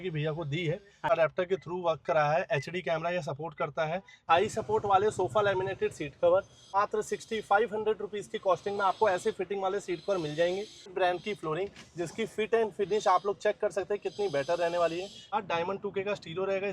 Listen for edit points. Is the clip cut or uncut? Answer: cut